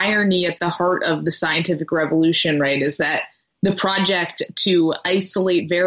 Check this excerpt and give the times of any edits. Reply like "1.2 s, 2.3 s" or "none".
none